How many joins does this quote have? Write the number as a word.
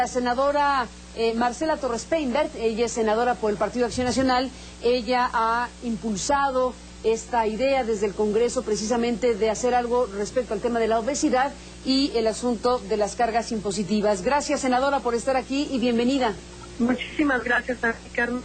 one